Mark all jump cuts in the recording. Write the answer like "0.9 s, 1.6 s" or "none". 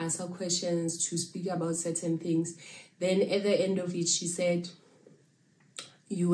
none